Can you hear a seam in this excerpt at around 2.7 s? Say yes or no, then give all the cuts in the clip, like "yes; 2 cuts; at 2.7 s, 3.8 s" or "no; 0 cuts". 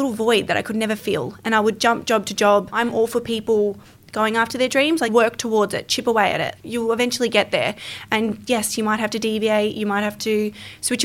yes; 2 cuts; at 2.7 s, 5.1 s